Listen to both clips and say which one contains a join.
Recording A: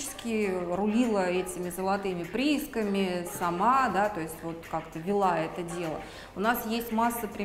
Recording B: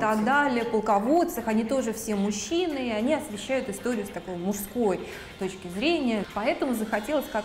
B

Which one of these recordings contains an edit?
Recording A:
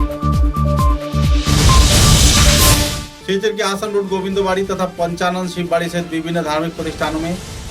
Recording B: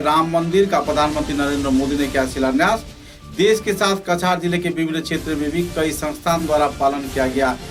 A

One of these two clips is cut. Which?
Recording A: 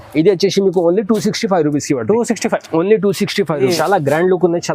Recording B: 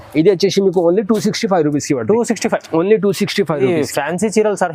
A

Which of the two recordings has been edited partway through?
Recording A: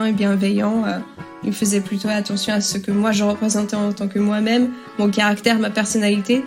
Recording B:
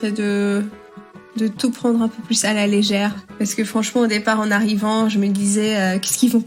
B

